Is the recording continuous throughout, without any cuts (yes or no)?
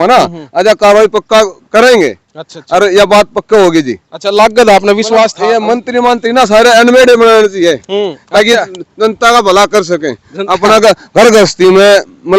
no